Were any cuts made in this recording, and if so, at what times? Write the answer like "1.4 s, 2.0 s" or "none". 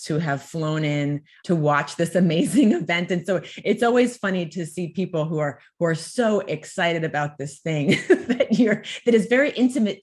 1.3 s